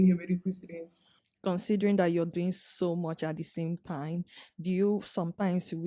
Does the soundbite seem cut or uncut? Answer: uncut